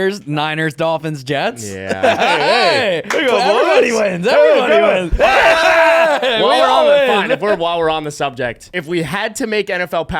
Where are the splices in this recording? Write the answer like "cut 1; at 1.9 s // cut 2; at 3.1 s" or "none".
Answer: cut 1; at 8.7 s